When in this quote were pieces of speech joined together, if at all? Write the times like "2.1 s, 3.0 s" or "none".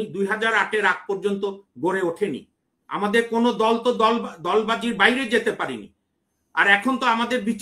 none